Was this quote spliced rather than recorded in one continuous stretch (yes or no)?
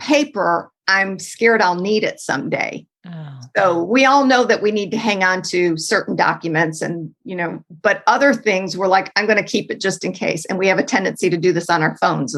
no